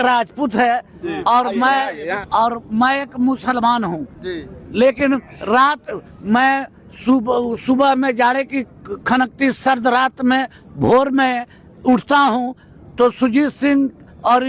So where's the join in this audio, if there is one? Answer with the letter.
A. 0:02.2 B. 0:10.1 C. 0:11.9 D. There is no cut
A